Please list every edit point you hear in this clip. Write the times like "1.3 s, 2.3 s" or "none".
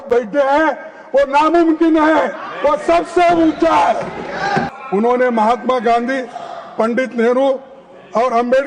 4.8 s